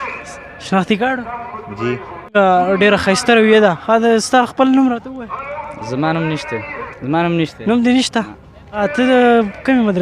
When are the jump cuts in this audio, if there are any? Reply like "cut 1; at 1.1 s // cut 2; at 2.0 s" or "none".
cut 1; at 2.3 s // cut 2; at 6.8 s // cut 3; at 8.8 s